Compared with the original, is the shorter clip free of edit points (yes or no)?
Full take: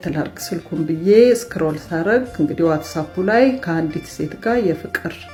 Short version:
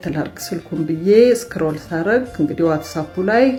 yes